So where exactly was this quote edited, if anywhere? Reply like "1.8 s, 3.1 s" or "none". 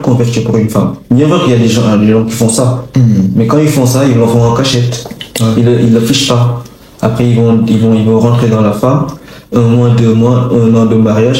none